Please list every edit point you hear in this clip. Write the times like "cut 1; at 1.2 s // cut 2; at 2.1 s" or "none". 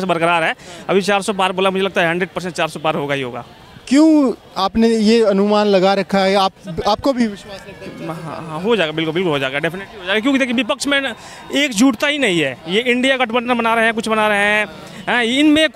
none